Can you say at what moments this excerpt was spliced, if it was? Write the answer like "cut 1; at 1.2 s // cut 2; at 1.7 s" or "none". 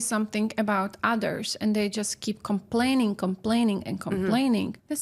none